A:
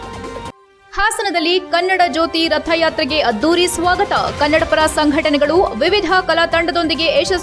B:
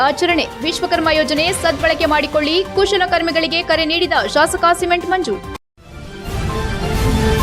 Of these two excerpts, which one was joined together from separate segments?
B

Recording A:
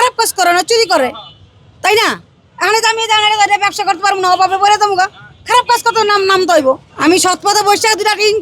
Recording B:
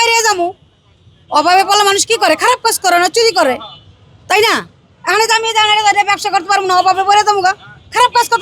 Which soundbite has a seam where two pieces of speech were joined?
A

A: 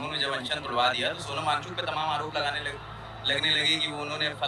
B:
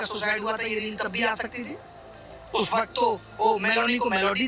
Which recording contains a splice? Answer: B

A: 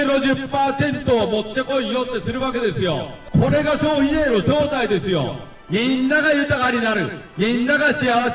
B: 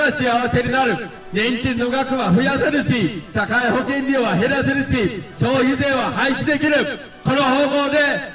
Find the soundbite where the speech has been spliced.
A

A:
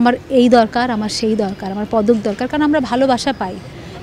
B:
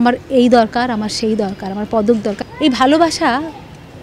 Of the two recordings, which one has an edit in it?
B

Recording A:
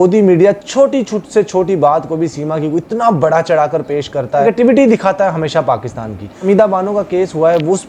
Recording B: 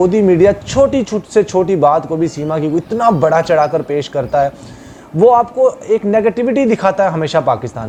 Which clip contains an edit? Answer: A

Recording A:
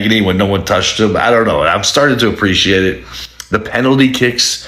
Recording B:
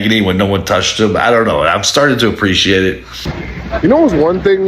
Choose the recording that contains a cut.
B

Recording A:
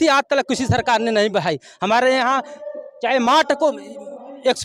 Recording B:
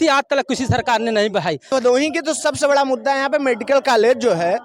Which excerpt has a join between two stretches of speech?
B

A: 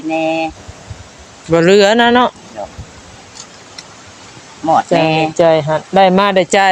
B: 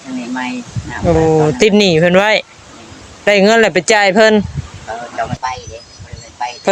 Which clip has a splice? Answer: B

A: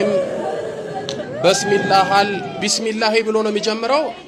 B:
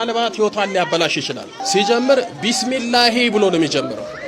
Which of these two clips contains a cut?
B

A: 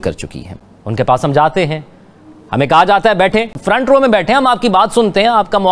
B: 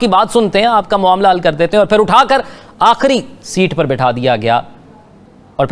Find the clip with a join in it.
A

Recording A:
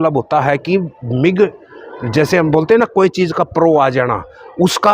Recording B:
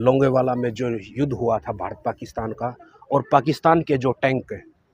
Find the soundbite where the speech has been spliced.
B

